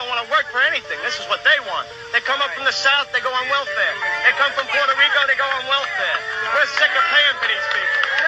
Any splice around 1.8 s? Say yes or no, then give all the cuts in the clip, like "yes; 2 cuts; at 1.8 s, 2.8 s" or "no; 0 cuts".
no; 1 cut; at 3.1 s